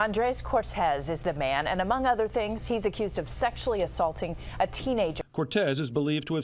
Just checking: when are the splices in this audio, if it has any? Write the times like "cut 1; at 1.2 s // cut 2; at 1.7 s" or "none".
cut 1; at 5.2 s